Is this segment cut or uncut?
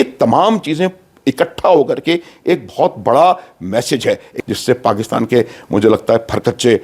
cut